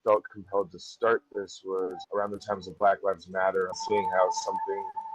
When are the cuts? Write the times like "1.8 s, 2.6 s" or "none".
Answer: 3.8 s